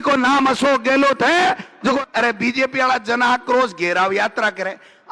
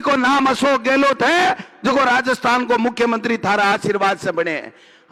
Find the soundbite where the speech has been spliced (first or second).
first